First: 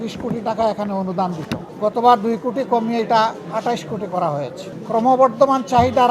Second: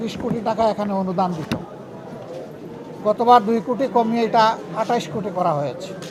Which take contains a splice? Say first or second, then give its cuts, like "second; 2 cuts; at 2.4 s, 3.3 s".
first; 2 cuts; at 1.7 s, 4.7 s